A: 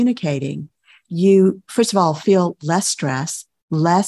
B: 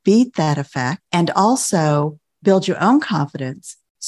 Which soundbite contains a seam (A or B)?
B